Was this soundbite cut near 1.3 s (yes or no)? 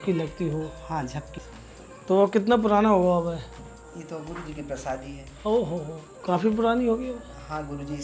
yes